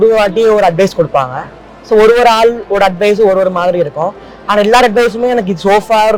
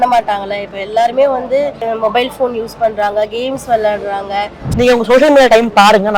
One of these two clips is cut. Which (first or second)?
second